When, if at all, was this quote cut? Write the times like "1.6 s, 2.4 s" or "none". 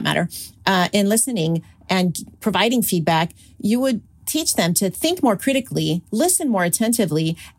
4.1 s